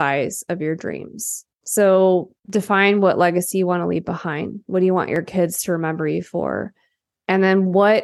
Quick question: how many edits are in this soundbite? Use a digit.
1